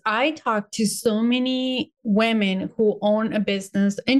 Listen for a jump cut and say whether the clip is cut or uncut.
cut